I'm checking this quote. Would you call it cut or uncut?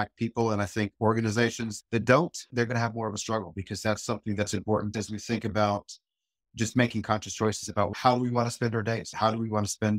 cut